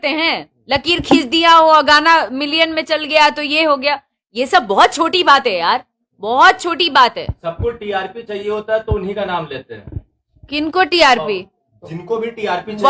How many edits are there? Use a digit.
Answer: 0